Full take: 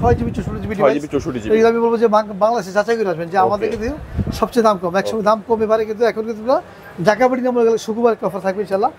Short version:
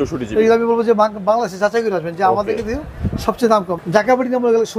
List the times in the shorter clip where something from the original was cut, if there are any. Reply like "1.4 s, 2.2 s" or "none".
3.7 s